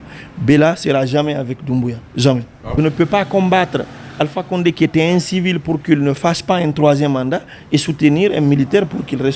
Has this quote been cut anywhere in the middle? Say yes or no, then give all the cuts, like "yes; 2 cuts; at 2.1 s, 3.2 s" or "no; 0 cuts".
yes; 1 cut; at 2.7 s